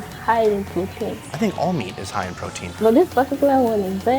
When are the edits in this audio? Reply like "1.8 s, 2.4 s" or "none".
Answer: 1.2 s, 2.7 s